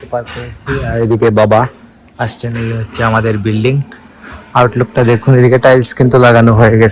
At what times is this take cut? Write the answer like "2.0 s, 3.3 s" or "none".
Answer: none